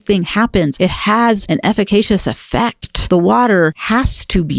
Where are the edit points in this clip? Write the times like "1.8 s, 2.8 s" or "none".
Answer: 1.1 s, 2.9 s, 3.8 s